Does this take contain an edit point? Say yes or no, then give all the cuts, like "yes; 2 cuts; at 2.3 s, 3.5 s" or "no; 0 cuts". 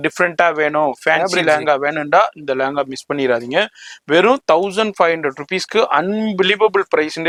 no; 0 cuts